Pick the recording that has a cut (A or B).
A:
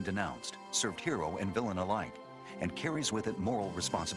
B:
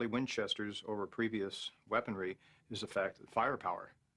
B